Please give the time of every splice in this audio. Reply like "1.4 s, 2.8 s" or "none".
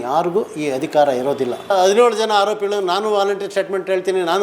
1.7 s